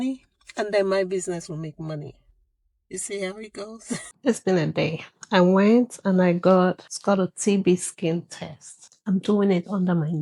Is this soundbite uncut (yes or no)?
no